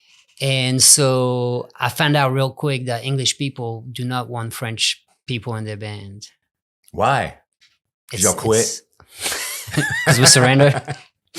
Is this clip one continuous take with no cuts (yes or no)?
no